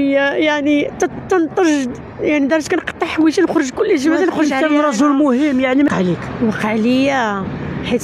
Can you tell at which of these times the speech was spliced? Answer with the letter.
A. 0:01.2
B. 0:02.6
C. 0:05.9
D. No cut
C